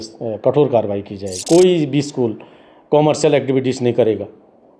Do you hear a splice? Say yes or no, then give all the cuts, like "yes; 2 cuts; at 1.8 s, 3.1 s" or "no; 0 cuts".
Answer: yes; 1 cut; at 1.3 s